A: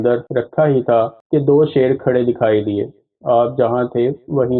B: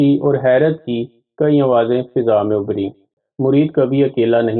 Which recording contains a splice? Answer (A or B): B